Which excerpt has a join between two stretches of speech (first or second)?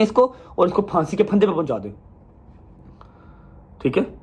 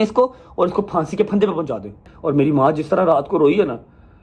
second